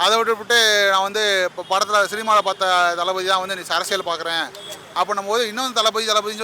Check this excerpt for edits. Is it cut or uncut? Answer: cut